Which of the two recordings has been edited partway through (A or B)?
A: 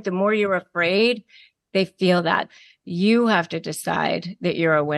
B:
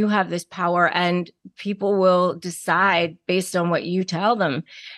A